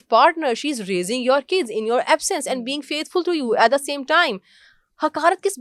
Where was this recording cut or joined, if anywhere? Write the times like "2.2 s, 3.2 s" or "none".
none

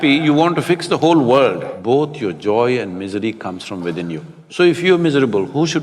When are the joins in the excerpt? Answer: 1.7 s, 4.4 s

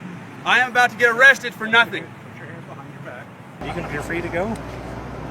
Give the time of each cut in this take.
3.6 s

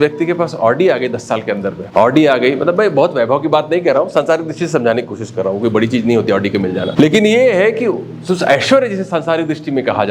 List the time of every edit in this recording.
1.8 s, 6.9 s

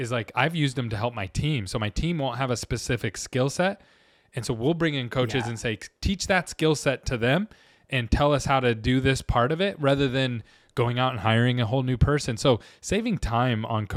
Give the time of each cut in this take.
none

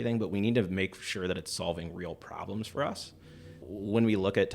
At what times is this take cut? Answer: 3.6 s

